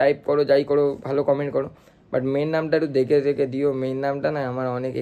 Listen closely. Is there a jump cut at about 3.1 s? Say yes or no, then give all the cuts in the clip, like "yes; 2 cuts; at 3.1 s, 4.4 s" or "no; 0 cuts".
no; 0 cuts